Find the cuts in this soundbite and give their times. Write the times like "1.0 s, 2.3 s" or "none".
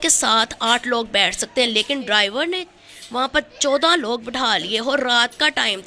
none